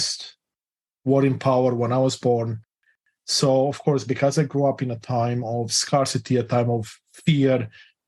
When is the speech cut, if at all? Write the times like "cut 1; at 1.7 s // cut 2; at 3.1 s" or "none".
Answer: cut 1; at 2.9 s